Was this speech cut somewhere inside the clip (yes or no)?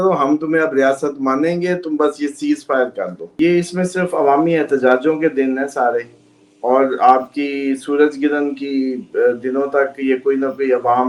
yes